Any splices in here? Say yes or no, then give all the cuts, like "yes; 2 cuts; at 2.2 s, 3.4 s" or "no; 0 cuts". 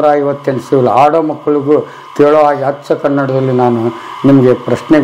no; 0 cuts